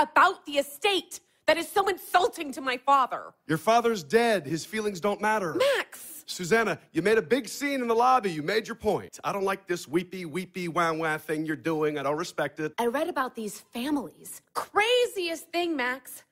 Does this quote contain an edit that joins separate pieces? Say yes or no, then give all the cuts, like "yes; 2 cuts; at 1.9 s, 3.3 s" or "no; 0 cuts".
yes; 2 cuts; at 9.0 s, 12.7 s